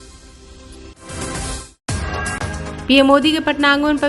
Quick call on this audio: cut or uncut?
cut